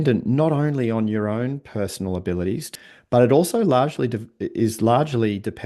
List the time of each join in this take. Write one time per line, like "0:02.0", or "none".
0:02.7